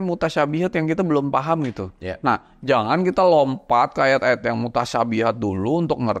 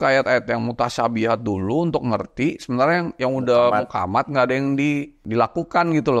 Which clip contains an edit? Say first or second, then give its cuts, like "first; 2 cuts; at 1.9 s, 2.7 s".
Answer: second; 1 cut; at 5.2 s